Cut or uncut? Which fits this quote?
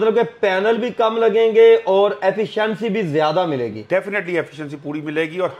uncut